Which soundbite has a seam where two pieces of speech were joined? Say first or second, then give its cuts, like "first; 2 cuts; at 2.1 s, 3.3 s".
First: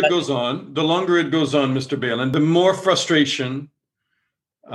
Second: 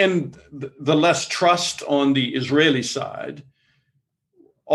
first; 1 cut; at 2.3 s